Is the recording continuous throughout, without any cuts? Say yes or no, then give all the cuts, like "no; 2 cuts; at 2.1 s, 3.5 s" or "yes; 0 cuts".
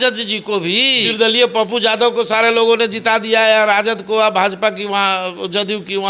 no; 1 cut; at 1.0 s